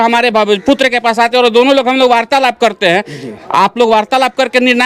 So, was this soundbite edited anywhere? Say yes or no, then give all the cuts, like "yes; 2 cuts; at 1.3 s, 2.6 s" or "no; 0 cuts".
no; 0 cuts